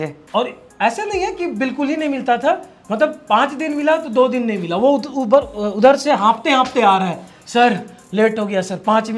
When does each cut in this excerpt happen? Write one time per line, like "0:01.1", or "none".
none

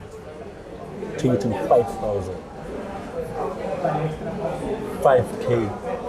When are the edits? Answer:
none

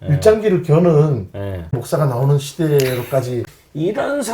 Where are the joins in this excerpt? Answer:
0:01.8
0:03.4

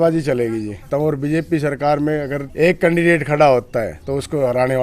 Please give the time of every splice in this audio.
0:00.8
0:02.4
0:04.0

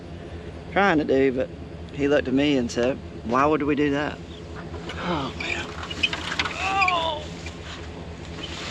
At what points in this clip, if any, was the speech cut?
none

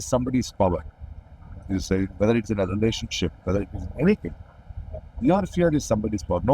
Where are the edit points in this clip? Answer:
none

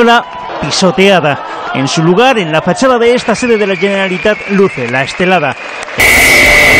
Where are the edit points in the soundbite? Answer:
none

